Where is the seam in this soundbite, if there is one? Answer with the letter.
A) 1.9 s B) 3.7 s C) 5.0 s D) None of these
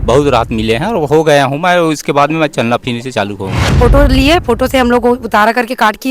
B